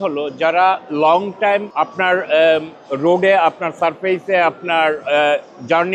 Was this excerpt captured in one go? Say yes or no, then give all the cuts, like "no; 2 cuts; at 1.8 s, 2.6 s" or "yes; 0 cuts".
no; 1 cut; at 1.7 s